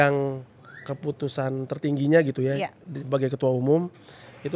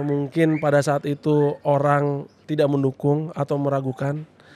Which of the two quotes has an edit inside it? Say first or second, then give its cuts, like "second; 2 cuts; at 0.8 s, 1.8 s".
second; 1 cut; at 2.3 s